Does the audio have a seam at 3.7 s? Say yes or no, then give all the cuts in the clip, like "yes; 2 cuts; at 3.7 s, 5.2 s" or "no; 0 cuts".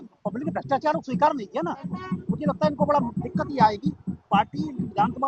no; 1 cut; at 2.1 s